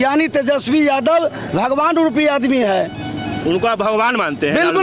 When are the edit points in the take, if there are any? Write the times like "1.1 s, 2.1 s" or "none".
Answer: none